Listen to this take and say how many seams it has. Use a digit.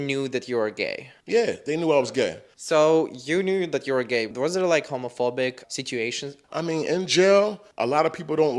0